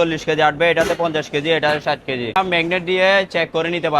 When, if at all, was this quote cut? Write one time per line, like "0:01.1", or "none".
0:02.4